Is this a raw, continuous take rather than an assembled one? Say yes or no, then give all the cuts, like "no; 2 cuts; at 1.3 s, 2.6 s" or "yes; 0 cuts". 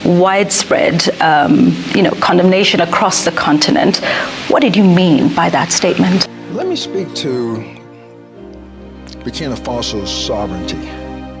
no; 2 cuts; at 7.9 s, 9.2 s